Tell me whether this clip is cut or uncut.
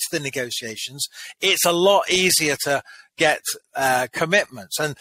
uncut